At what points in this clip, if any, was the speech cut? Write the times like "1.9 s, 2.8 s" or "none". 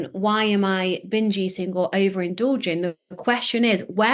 none